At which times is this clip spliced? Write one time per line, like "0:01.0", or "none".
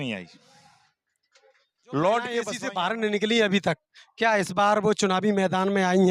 0:02.5